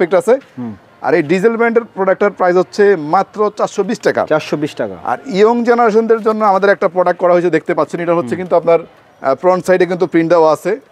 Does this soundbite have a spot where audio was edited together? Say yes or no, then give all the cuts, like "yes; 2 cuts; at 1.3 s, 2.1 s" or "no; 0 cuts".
no; 0 cuts